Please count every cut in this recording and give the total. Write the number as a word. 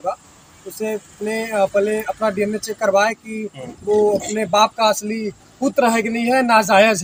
zero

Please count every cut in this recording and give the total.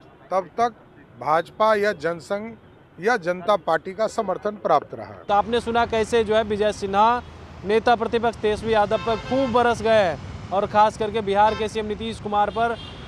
zero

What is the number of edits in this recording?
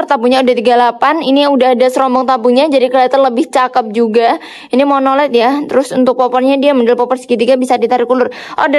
zero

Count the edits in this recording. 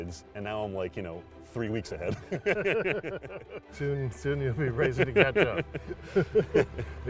one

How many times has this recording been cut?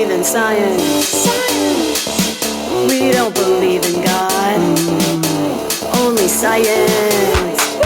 zero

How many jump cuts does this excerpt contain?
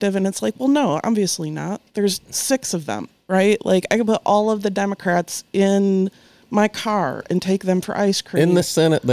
one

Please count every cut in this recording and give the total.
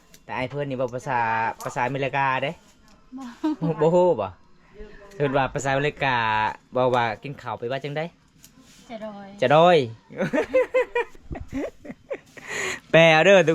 two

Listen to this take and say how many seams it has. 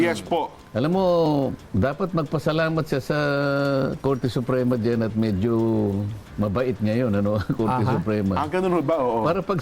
one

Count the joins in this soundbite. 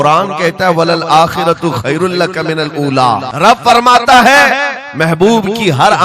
one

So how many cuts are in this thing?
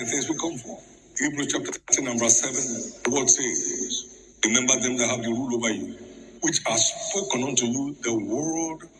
one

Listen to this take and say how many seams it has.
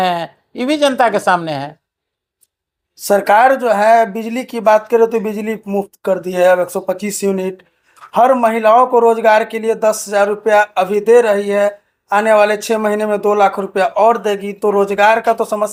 zero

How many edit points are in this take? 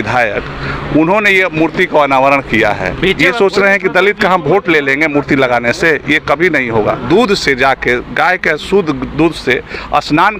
two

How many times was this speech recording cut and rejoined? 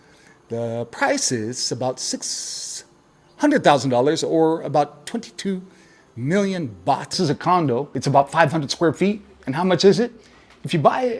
one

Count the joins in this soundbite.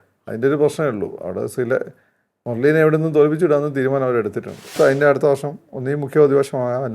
one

